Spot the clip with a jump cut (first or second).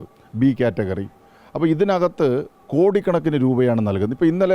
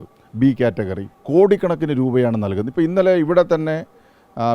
second